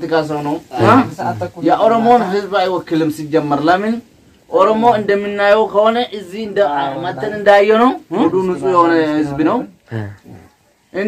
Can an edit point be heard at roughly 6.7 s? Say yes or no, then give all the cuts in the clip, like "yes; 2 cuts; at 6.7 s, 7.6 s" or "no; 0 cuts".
no; 1 cut; at 8.2 s